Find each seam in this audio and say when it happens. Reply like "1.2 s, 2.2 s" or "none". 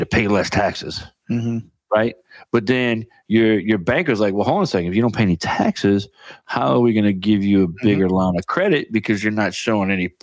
none